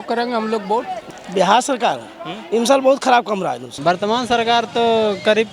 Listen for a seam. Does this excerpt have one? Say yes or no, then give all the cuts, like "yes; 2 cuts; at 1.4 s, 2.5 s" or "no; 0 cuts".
yes; 2 cuts; at 1.0 s, 3.7 s